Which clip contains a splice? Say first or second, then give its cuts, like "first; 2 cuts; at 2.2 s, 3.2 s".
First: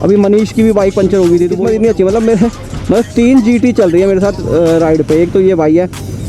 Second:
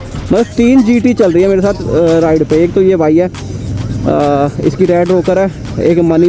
first; 1 cut; at 1.6 s